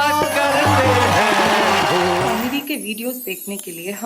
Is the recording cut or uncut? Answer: cut